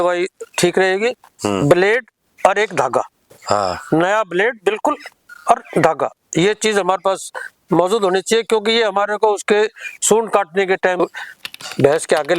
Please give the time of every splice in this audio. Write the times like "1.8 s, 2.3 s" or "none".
11.0 s